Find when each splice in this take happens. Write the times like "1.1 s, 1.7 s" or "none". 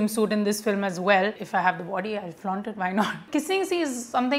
1.4 s, 3.2 s